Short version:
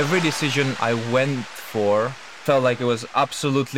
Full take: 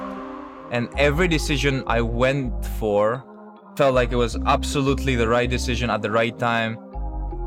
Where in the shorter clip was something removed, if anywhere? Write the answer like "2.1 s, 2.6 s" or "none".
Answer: 2.2 s